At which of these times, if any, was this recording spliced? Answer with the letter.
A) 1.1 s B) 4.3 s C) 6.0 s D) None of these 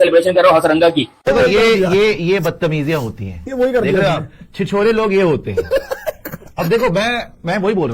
A